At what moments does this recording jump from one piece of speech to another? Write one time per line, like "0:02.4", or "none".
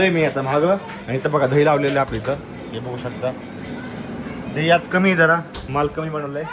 none